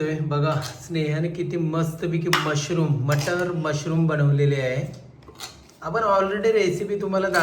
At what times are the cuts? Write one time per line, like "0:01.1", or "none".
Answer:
none